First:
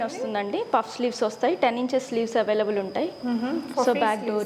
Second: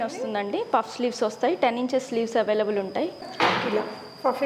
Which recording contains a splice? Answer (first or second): second